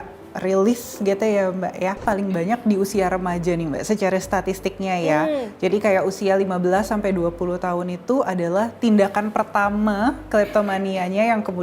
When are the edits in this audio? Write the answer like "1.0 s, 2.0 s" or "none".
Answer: 2.0 s